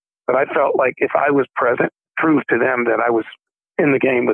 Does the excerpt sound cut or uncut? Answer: cut